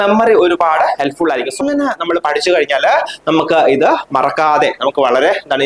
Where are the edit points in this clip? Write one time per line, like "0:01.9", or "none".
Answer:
0:01.6